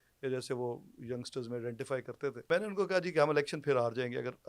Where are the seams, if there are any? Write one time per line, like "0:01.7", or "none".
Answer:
0:02.5